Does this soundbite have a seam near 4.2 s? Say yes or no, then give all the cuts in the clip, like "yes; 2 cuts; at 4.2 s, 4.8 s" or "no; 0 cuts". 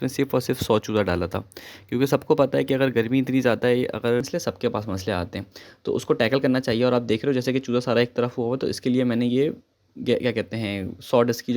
yes; 1 cut; at 4.2 s